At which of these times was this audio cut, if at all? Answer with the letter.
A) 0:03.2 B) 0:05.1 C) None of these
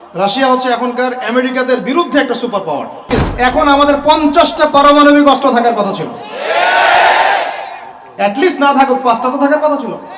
A